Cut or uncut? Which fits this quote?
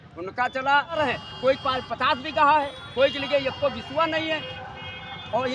cut